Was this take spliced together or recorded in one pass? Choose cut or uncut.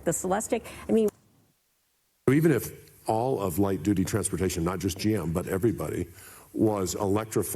cut